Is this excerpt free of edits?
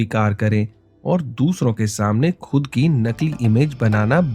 yes; 0 cuts

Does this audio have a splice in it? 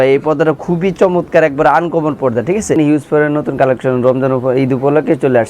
yes; 1 cut; at 2.8 s

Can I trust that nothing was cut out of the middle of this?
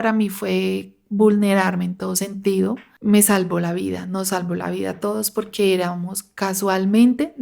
no; 1 cut; at 2.9 s

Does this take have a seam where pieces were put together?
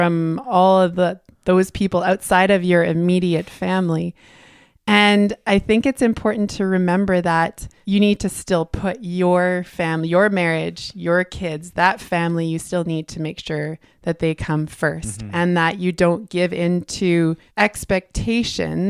yes; 2 cuts; at 7.7 s, 17.4 s

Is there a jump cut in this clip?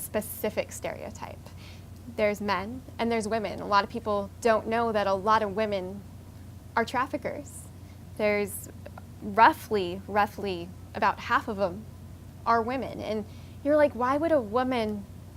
no; 0 cuts

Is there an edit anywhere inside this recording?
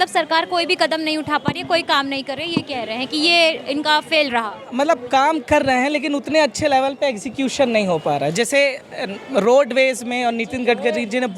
no; 0 cuts

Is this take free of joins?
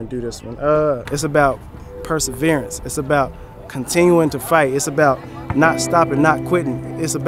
no; 1 cut; at 1.0 s

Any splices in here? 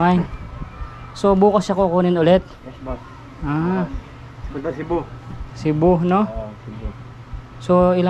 no; 0 cuts

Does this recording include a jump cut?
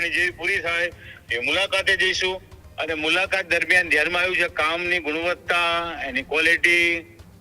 no; 0 cuts

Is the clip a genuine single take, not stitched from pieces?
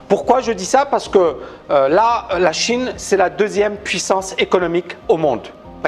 yes; 0 cuts

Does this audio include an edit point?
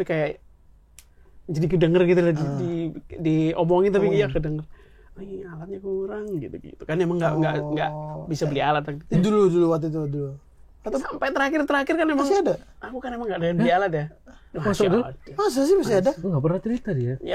no; 0 cuts

